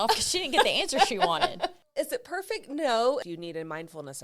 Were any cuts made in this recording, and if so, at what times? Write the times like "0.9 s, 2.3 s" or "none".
1.8 s, 3.2 s